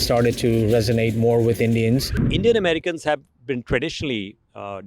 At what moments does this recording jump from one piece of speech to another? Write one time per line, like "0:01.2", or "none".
0:02.3

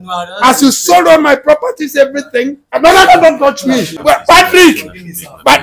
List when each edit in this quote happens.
0:02.6
0:03.9

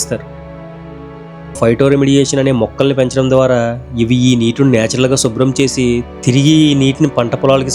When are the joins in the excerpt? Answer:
0:01.6

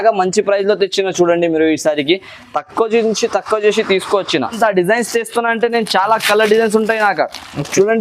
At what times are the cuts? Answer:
0:04.5

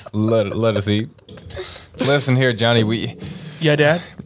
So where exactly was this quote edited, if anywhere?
0:01.9

